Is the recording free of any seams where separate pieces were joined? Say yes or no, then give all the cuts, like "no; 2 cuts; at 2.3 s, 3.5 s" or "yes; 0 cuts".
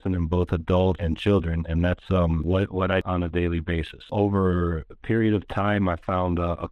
no; 3 cuts; at 1.0 s, 3.0 s, 4.1 s